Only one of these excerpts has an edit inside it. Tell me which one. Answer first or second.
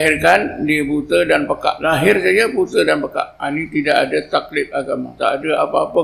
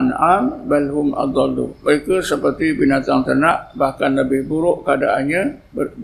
first